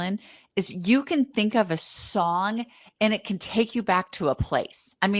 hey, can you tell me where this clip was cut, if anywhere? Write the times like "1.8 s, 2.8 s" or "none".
none

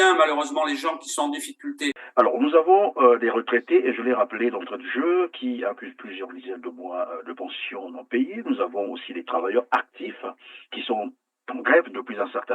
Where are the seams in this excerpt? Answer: 2.0 s

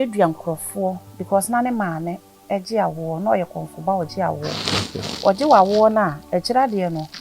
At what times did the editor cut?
1.1 s

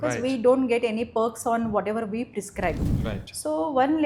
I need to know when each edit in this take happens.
2.9 s

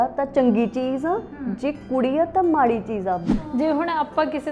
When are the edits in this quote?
3.3 s

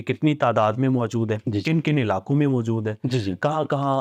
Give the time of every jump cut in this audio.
none

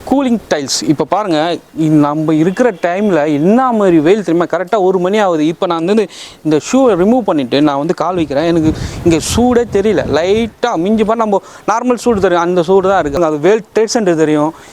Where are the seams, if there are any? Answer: 13.2 s

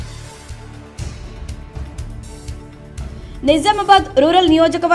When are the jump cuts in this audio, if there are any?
none

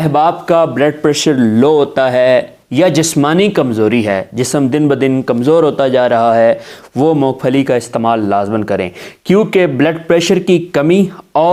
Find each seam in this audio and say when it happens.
none

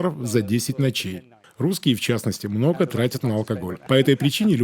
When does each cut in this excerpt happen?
1.4 s, 3.7 s

